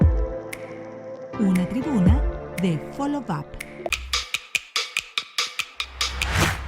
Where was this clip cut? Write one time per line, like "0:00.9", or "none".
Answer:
0:03.9